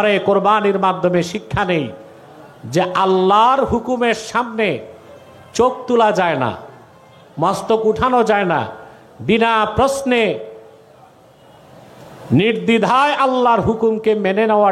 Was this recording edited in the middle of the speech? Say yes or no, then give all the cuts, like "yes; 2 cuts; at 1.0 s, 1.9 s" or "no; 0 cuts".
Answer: no; 0 cuts